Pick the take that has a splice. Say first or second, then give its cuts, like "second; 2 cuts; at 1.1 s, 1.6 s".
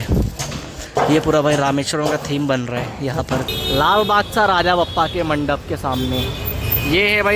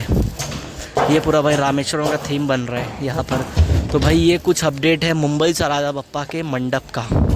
first; 1 cut; at 3.5 s